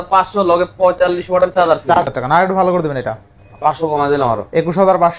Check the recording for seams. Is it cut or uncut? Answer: cut